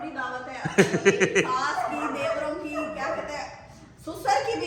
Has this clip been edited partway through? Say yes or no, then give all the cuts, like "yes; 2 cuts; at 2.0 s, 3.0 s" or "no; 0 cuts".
no; 0 cuts